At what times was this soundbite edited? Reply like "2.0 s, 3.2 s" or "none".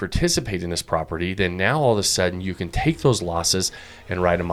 none